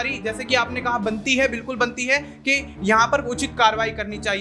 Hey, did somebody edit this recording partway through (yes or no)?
no